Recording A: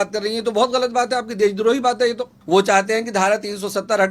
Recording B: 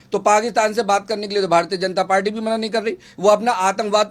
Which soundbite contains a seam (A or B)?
A